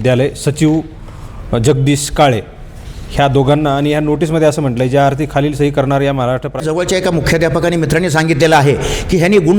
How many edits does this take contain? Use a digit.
1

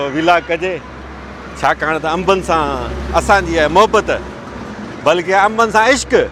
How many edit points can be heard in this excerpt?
0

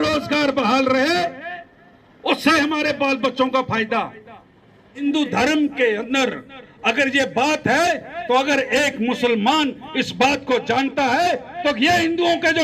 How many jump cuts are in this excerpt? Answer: 1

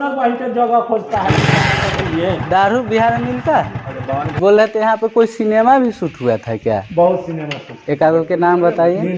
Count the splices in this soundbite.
1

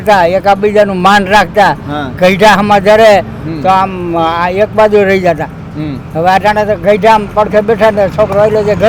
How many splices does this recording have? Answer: 0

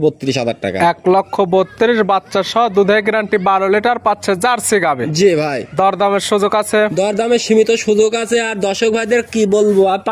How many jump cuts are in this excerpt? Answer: 0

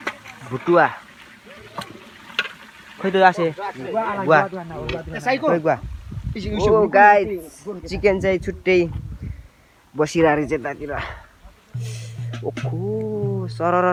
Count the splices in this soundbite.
0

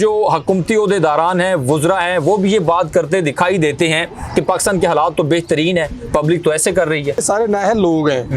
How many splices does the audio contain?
1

